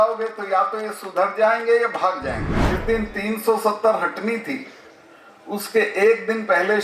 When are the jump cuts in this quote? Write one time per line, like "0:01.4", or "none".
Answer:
0:02.5